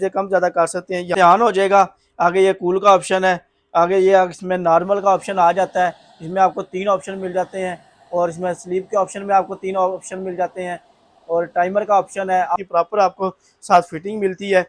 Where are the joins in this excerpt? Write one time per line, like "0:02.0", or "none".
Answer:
0:01.1
0:12.6